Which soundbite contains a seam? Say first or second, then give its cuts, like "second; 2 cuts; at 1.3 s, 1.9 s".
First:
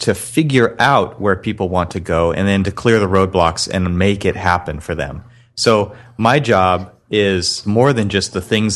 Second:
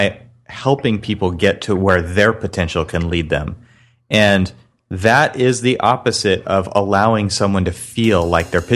first; 1 cut; at 7.6 s